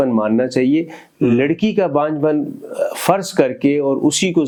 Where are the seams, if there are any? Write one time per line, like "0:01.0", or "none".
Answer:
none